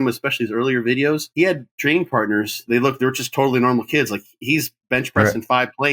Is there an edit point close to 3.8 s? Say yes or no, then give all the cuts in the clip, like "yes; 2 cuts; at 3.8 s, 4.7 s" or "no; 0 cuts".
no; 2 cuts; at 1.3 s, 2.6 s